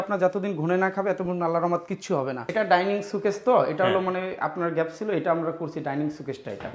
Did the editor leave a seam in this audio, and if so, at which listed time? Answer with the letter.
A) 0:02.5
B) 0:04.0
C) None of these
A